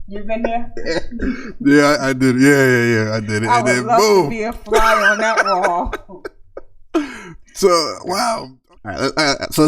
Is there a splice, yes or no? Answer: yes